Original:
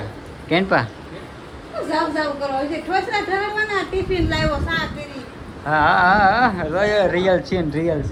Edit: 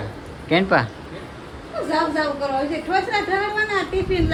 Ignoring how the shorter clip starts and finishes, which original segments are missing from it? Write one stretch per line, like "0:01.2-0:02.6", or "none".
none